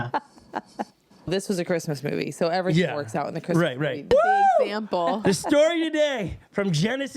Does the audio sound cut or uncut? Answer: cut